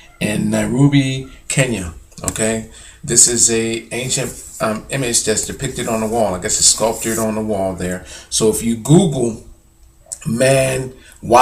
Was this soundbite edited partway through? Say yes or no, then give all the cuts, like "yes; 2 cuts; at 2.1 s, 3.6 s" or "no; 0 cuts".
yes; 1 cut; at 5.4 s